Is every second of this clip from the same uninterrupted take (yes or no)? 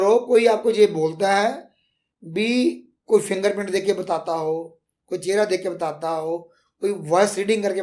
yes